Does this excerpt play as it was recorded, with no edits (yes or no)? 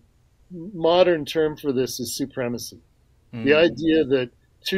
yes